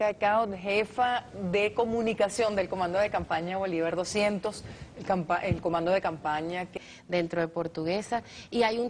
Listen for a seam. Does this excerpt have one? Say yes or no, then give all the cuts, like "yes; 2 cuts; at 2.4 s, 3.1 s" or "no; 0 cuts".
no; 0 cuts